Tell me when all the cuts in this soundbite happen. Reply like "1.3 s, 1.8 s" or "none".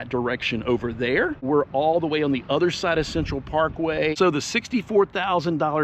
1.5 s, 4.1 s